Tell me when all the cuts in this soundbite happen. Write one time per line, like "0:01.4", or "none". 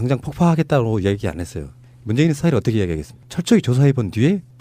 none